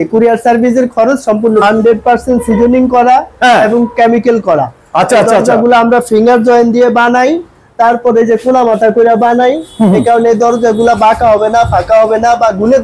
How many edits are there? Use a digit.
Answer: 1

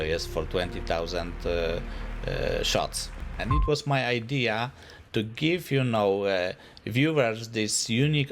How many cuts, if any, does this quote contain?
1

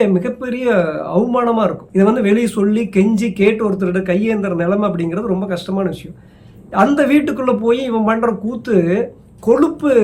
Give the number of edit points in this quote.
1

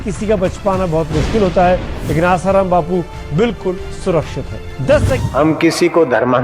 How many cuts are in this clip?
1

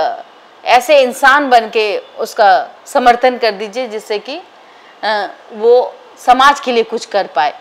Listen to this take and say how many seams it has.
0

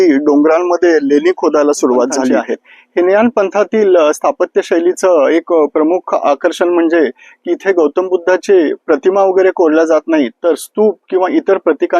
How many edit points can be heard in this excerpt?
1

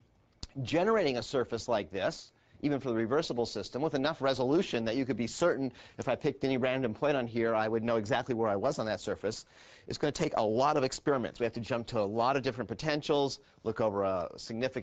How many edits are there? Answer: 1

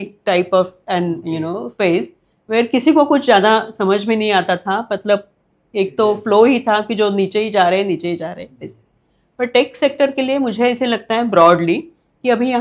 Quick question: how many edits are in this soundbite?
0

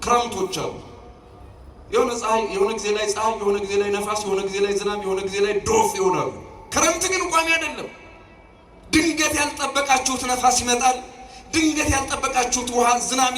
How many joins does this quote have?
1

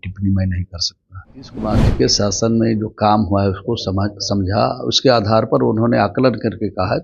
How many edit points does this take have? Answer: 1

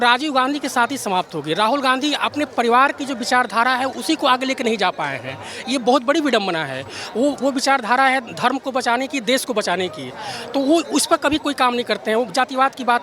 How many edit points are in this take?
0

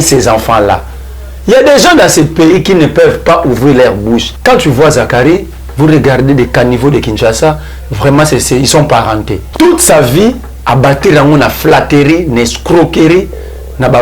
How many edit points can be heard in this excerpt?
2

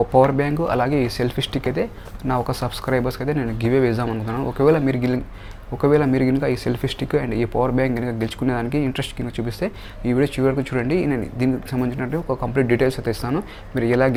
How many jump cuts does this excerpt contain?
0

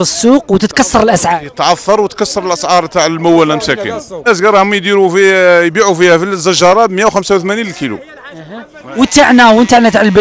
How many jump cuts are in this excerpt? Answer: 1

